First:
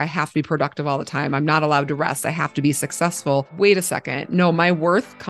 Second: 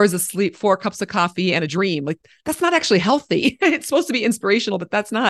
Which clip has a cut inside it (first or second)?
first